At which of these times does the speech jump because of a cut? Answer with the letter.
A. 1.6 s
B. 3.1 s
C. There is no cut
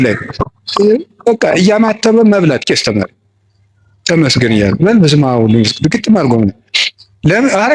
C